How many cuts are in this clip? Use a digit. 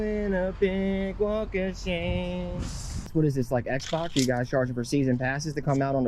1